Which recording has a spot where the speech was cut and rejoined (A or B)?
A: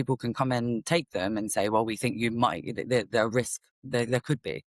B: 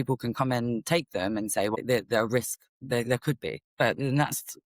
B